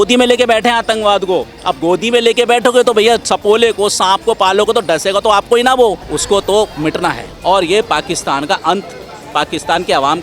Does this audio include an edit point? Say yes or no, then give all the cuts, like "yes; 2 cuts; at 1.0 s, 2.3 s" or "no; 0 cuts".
yes; 1 cut; at 6.1 s